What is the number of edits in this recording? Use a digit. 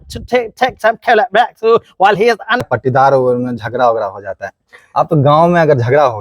1